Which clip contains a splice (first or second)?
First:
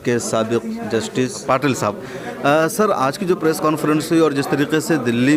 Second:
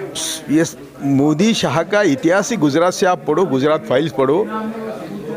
first